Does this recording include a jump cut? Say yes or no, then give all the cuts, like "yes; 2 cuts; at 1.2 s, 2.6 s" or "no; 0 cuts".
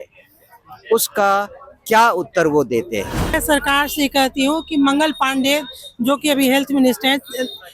yes; 1 cut; at 3.4 s